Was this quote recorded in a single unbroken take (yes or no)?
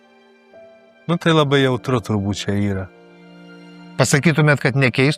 no